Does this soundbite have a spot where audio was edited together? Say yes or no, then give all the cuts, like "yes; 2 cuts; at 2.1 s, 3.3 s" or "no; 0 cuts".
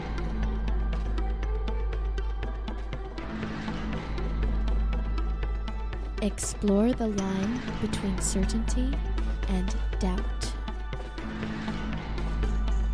no; 0 cuts